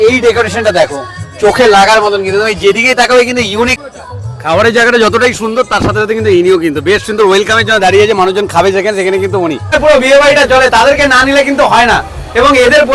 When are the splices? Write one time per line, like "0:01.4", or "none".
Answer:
0:03.7
0:09.7